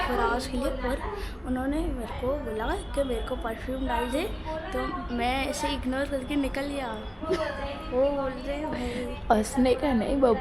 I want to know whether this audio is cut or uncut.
uncut